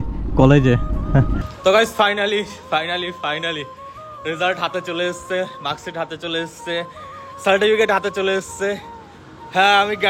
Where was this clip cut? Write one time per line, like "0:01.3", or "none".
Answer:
0:01.4